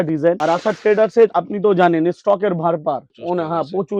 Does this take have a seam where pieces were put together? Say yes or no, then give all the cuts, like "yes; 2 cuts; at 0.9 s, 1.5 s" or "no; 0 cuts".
no; 0 cuts